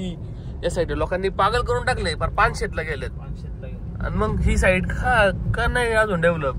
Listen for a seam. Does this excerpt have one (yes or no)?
no